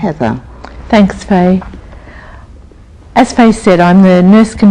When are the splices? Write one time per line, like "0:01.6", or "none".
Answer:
none